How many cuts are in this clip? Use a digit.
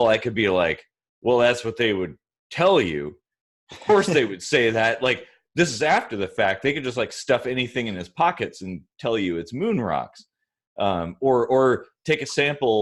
0